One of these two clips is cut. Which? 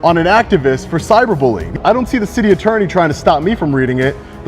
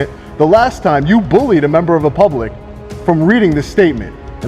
first; 1 cut; at 1.7 s

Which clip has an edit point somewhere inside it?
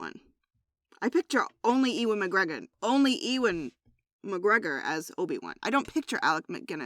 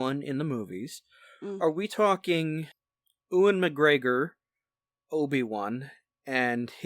second; 1 cut; at 2.7 s

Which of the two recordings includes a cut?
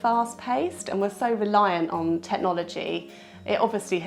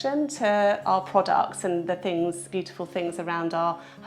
second; 1 cut; at 2.4 s

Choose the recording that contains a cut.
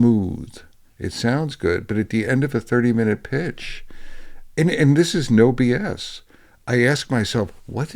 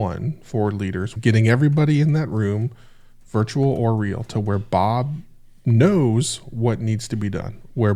second; 1 cut; at 1.2 s

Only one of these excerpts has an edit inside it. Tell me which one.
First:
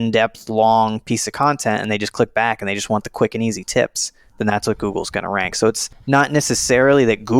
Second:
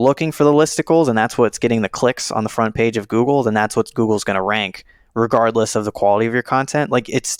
first; 1 cut; at 5.9 s

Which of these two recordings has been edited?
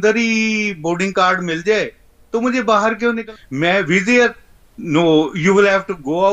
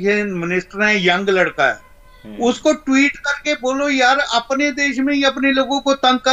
first; 1 cut; at 3.2 s

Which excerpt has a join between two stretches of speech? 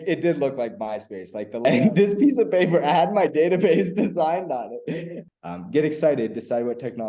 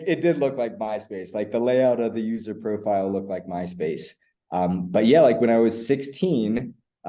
first; 2 cuts; at 1.6 s, 5.1 s

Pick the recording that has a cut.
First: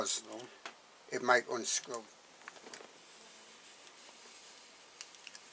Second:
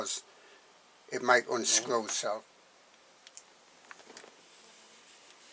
first; 1 cut; at 1.7 s

